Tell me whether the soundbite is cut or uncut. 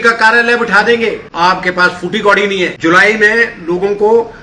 cut